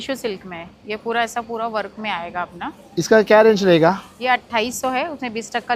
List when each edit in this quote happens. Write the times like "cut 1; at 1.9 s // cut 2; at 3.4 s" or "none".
none